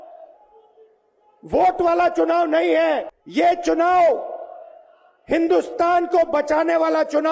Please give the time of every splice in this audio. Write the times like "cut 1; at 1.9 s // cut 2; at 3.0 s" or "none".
cut 1; at 3.2 s